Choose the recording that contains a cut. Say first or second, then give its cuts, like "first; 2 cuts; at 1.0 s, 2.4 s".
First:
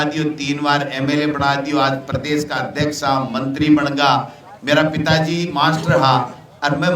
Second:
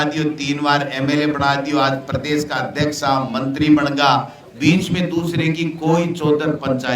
second; 1 cut; at 4.4 s